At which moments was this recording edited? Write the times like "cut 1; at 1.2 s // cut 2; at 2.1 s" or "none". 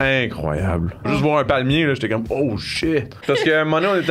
cut 1; at 1.1 s // cut 2; at 3.2 s